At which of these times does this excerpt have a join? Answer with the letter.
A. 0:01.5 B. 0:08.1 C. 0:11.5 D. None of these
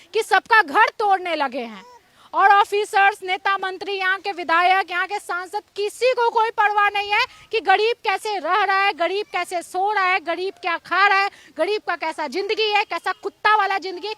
D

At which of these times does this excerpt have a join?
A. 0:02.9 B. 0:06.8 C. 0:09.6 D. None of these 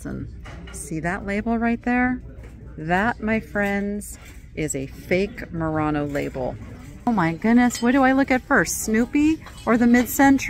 B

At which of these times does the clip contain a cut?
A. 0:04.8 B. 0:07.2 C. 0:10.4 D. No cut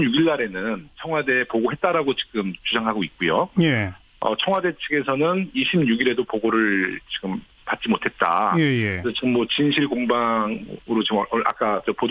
C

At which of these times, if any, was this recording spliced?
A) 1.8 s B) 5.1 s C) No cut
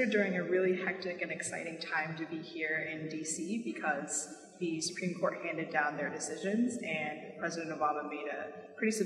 A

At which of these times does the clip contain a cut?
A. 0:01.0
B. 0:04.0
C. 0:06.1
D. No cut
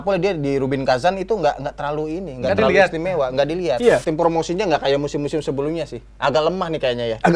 B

